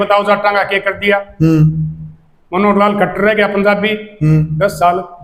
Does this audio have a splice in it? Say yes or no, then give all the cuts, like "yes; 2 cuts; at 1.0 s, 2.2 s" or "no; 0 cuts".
no; 0 cuts